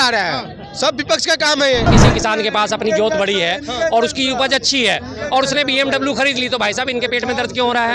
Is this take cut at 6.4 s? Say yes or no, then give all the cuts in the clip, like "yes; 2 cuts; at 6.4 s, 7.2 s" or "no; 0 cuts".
no; 1 cut; at 1.9 s